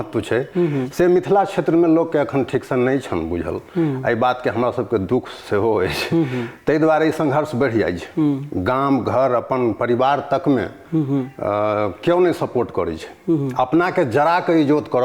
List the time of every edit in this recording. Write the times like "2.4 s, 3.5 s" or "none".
none